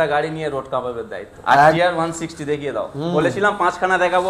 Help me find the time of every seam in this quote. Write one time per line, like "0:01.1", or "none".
0:01.8